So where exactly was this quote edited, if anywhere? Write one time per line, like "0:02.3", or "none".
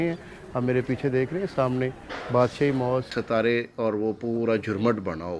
0:03.1